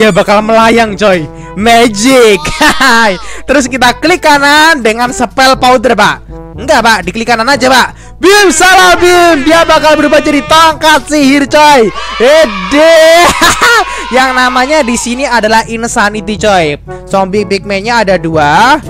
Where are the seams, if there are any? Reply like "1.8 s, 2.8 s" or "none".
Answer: 16.9 s